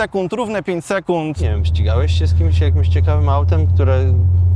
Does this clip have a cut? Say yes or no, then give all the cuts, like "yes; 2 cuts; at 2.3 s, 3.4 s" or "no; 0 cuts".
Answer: yes; 1 cut; at 1.4 s